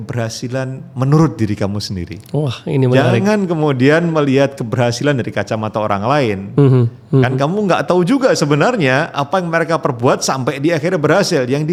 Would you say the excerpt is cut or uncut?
uncut